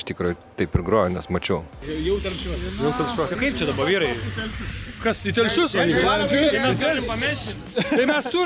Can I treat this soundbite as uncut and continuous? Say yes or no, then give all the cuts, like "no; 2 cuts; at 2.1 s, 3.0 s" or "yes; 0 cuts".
no; 1 cut; at 1.8 s